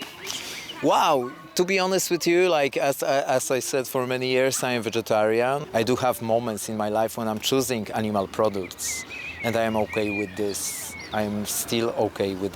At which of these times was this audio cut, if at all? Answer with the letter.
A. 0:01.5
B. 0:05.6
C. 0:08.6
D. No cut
B